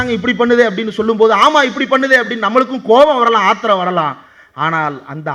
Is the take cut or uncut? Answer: uncut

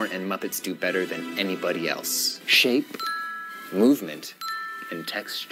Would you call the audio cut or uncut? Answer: uncut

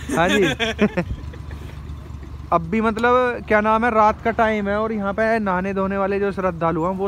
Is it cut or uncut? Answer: uncut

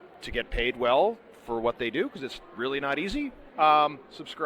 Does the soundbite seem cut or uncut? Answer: cut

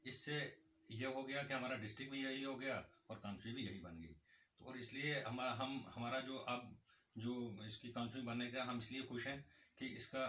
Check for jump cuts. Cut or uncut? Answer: uncut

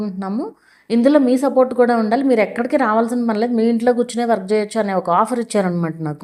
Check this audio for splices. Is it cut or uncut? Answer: uncut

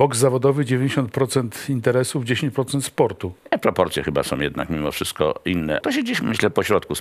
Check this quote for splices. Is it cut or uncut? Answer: cut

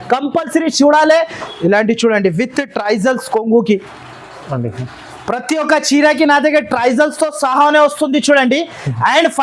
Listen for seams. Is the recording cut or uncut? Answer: cut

